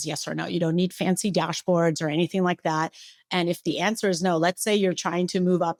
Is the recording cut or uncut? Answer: uncut